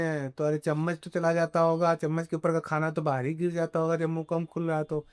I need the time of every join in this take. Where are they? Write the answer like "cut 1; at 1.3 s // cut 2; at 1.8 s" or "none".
none

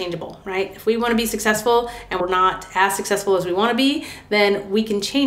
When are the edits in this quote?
cut 1; at 2.2 s

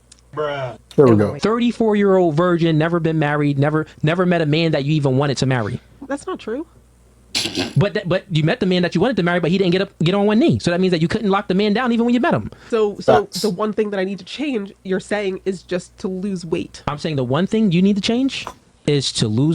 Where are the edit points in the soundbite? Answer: cut 1; at 1.4 s // cut 2; at 12.6 s

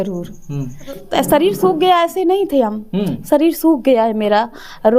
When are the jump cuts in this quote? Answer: cut 1; at 1.0 s

